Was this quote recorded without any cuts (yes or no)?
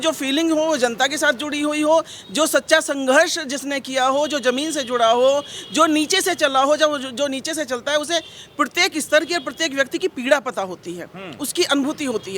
yes